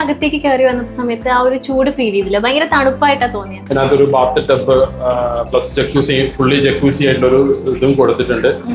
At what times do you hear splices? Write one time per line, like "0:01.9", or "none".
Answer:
0:03.6